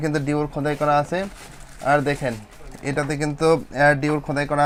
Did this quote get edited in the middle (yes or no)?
no